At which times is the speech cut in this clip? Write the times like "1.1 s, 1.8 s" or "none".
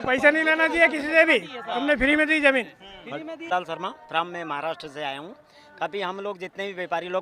3.5 s